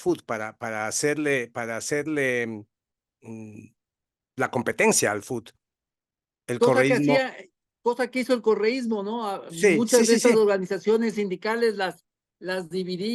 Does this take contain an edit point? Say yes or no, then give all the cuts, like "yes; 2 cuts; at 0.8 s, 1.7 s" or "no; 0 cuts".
no; 0 cuts